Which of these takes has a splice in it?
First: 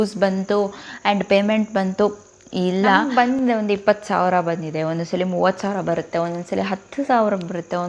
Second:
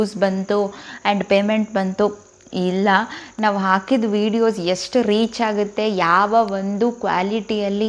first; 1 cut; at 3.1 s

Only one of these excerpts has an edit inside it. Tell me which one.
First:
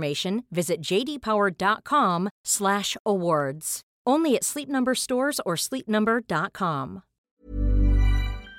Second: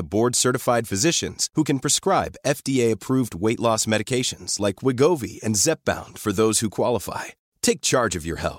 first; 1 cut; at 7.3 s

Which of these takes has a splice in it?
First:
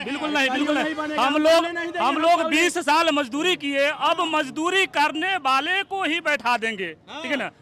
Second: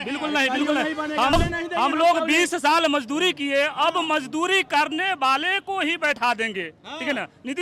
second; 1 cut; at 1.3 s

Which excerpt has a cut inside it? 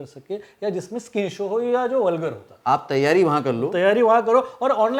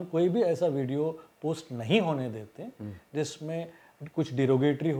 first; 1 cut; at 2.5 s

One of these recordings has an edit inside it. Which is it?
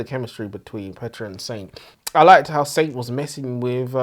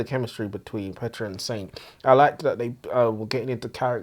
first; 1 cut; at 1.9 s

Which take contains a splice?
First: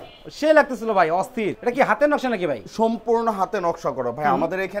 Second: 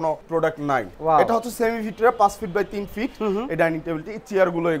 second; 1 cut; at 0.9 s

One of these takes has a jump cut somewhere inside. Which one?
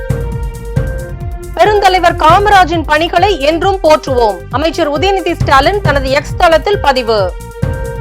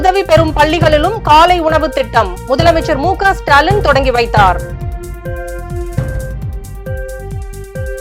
first; 1 cut; at 1.0 s

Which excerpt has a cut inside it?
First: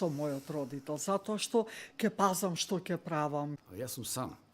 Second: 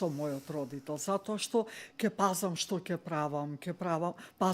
first; 1 cut; at 3.6 s

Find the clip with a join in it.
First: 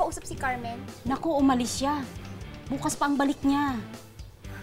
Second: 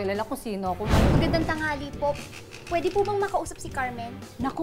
second; 1 cut; at 1.1 s

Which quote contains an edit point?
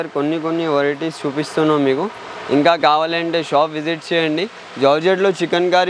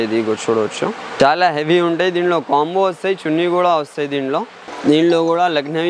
second; 2 cuts; at 1.1 s, 4.6 s

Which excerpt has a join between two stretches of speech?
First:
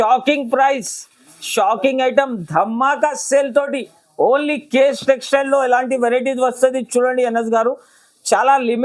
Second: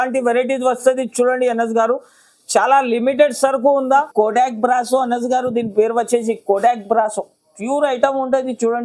second; 1 cut; at 4.1 s

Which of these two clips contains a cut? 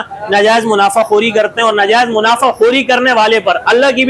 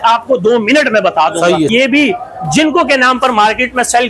second; 1 cut; at 1.7 s

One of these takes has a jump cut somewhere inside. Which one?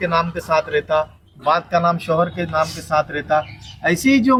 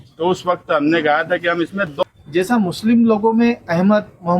second; 1 cut; at 2.0 s

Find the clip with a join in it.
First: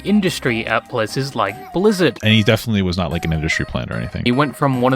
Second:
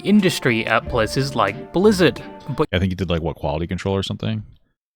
first; 2 cuts; at 2.2 s, 4.2 s

